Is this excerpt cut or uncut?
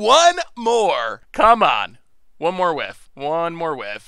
cut